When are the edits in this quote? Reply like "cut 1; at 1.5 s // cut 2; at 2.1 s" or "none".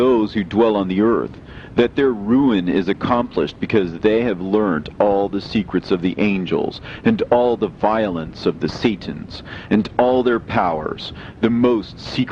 cut 1; at 5.8 s

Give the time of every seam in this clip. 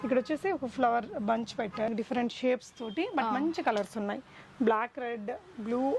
cut 1; at 1.9 s

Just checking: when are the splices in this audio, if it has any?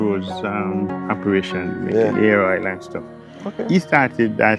cut 1; at 1.0 s

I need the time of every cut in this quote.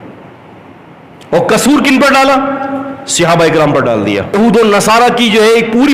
cut 1; at 4.3 s

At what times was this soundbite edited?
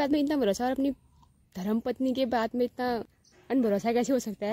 cut 1; at 3.1 s

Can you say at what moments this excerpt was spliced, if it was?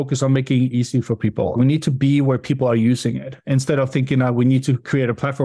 none

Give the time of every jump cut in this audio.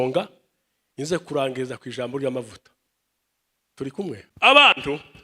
cut 1; at 4.3 s

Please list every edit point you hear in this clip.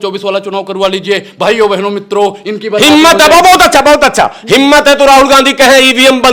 none

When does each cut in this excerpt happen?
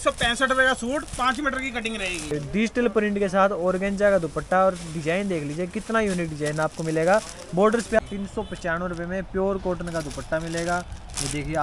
cut 1; at 2.3 s // cut 2; at 8.0 s

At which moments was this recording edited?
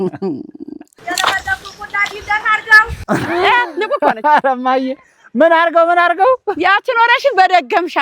cut 1; at 1.0 s

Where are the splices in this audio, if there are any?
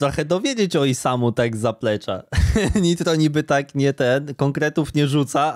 none

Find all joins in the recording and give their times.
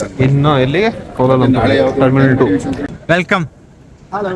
cut 1; at 2.9 s

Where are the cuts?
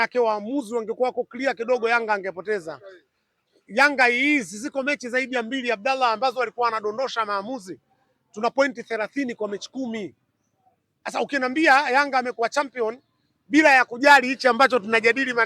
none

